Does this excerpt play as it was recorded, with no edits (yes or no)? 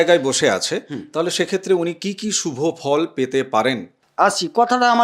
no